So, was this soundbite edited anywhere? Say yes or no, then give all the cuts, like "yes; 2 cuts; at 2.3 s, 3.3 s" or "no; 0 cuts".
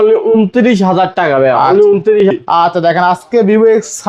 yes; 1 cut; at 2.3 s